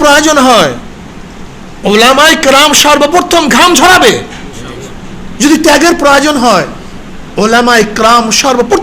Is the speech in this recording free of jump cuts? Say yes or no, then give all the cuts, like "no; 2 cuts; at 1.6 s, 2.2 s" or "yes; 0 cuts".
yes; 0 cuts